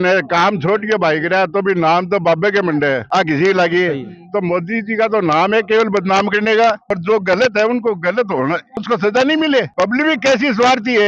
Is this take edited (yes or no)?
no